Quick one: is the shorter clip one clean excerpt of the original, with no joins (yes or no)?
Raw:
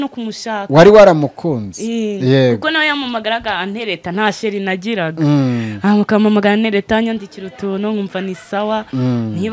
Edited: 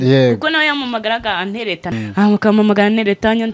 no